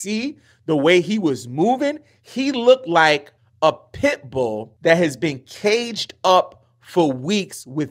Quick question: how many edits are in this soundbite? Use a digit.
2